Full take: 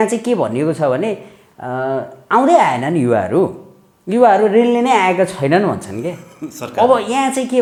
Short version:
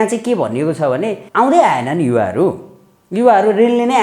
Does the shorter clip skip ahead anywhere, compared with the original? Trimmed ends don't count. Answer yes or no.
yes